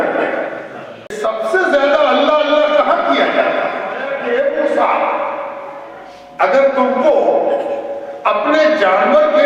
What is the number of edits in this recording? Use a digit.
2